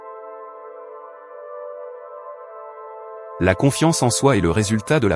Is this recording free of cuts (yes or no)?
yes